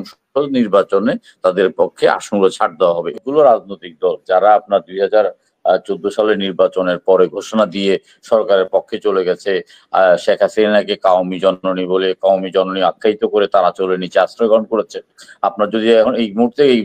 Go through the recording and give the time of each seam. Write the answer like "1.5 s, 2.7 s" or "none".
3.2 s